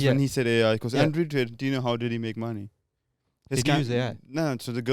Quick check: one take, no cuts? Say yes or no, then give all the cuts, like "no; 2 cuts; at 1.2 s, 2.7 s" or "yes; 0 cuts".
yes; 0 cuts